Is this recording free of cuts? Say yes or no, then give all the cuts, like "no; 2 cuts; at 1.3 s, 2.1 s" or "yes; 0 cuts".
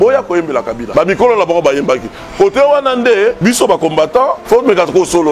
no; 3 cuts; at 0.8 s, 3.4 s, 4.4 s